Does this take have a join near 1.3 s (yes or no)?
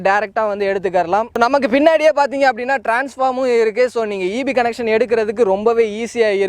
no